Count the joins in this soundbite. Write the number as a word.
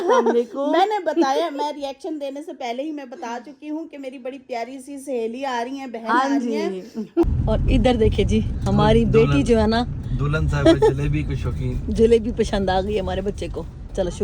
one